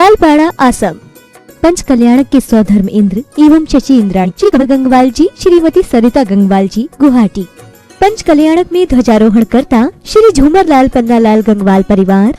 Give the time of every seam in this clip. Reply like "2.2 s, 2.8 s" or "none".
4.6 s